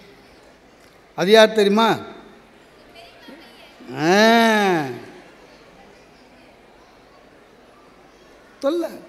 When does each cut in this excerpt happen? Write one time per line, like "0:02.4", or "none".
none